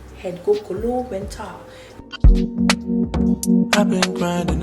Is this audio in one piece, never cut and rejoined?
no; 1 cut; at 2.0 s

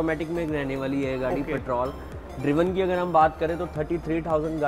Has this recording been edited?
no; 0 cuts

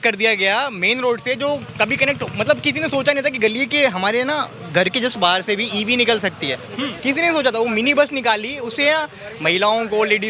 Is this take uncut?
yes; 0 cuts

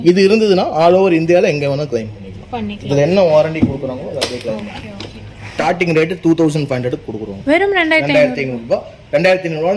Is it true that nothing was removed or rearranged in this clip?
no; 1 cut; at 5.4 s

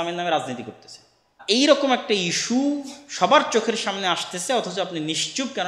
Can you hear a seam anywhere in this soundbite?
yes; 1 cut; at 1.4 s

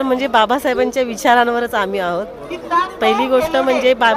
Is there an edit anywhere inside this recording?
no; 0 cuts

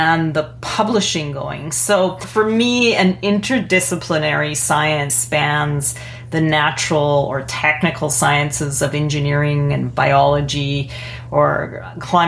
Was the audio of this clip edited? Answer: yes; 2 cuts; at 2.3 s, 5.2 s

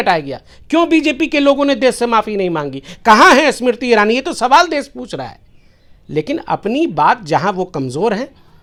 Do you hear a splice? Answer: no; 0 cuts

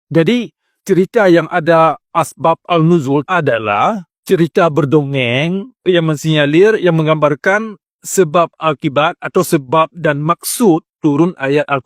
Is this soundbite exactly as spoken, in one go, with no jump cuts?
yes; 0 cuts

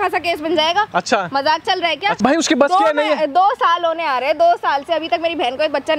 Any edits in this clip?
yes; 1 cut; at 2.2 s

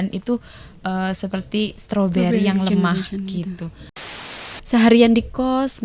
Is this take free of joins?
no; 1 cut; at 4.2 s

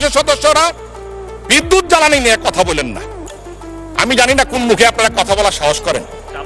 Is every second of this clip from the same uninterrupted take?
yes; 0 cuts

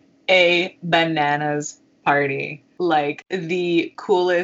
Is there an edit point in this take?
yes; 2 cuts; at 2.6 s, 3.2 s

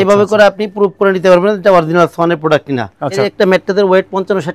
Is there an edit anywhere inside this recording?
yes; 1 cut; at 3.2 s

